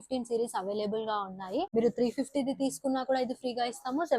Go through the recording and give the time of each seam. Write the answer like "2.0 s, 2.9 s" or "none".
1.7 s